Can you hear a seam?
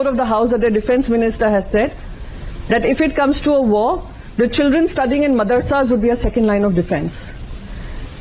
no; 0 cuts

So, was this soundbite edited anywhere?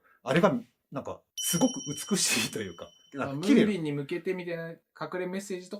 no; 0 cuts

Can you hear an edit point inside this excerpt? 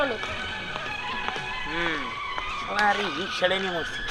no; 0 cuts

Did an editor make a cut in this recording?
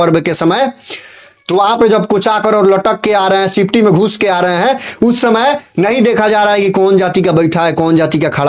no; 0 cuts

